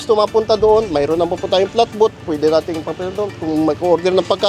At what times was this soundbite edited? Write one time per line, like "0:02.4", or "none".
none